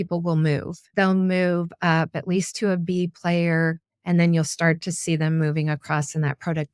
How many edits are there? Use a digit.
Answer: 0